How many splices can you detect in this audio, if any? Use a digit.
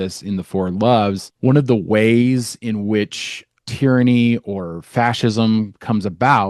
1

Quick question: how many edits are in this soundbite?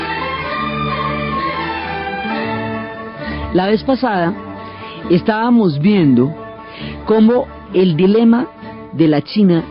1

